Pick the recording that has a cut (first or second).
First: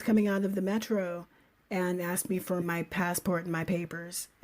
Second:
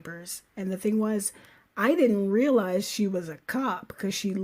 first